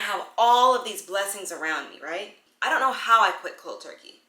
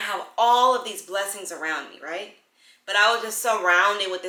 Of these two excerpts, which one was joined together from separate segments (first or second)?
first